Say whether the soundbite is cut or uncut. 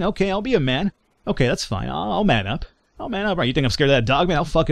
cut